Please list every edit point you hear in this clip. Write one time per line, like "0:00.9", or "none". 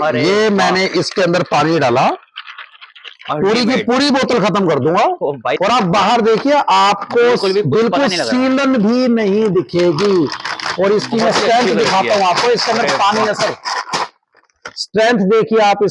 0:05.6

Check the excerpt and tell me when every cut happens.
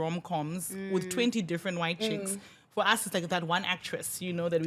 none

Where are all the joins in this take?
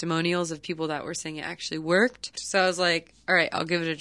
0:02.3

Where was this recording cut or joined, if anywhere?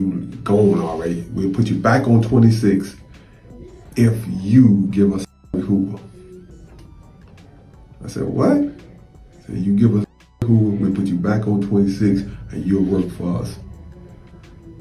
none

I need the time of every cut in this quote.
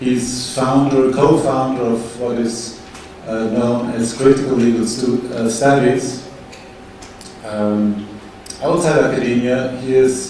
none

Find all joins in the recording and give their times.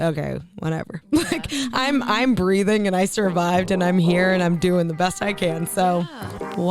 none

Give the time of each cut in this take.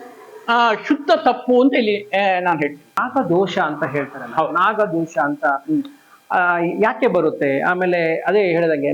0:03.0

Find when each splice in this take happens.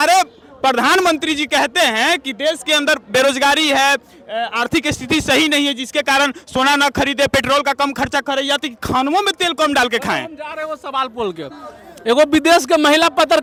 none

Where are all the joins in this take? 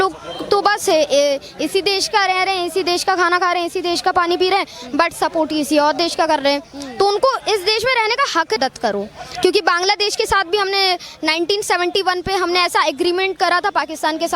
0:08.6

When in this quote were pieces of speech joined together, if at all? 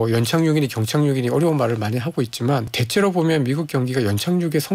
0:02.8

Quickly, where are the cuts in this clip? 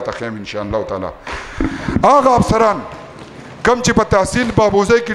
none

